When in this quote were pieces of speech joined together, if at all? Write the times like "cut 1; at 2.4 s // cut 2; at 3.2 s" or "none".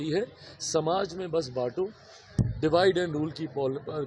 none